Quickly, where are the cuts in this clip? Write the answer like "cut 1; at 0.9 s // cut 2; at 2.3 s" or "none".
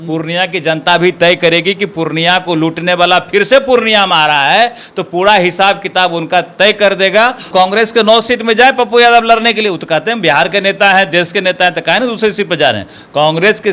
cut 1; at 7.5 s